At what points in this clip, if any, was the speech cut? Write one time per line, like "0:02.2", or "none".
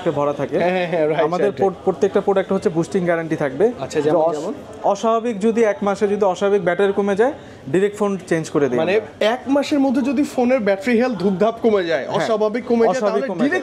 none